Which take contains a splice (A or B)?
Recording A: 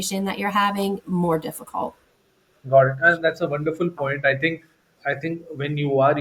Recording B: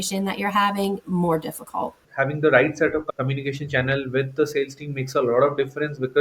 B